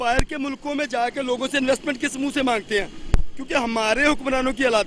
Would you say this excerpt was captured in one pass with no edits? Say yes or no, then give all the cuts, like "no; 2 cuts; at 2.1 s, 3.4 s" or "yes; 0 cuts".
yes; 0 cuts